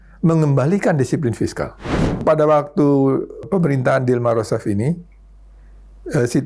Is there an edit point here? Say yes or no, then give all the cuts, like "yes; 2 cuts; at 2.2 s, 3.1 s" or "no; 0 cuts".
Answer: yes; 2 cuts; at 2.2 s, 3.5 s